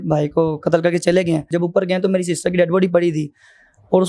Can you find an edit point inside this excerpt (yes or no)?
yes